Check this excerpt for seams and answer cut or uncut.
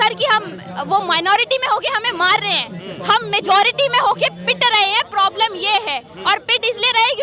uncut